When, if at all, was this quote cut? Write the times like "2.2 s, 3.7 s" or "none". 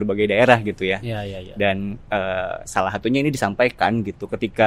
none